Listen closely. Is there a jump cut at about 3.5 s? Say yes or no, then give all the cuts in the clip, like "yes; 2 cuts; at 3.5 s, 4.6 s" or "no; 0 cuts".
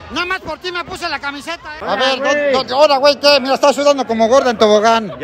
no; 1 cut; at 1.7 s